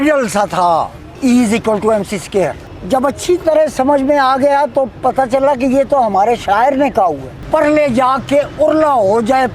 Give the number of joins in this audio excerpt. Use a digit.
3